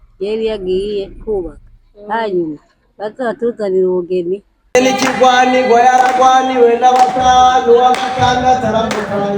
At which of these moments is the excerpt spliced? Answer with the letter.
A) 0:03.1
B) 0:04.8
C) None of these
B